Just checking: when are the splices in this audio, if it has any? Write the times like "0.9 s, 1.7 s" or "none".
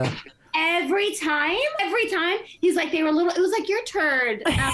1.8 s